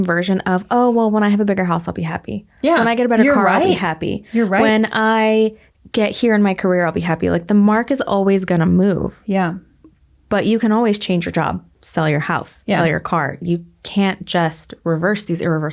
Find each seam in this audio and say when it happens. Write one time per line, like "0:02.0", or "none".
none